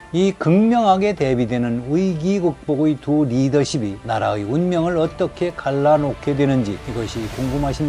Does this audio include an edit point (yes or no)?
no